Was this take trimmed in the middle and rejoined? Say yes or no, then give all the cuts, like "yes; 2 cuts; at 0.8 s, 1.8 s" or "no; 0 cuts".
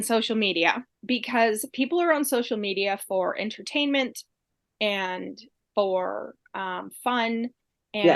yes; 1 cut; at 1.0 s